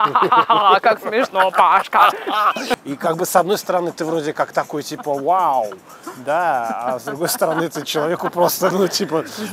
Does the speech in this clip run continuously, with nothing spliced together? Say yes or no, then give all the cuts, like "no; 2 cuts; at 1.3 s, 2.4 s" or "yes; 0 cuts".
no; 1 cut; at 2.8 s